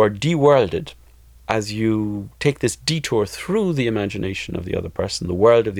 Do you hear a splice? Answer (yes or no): no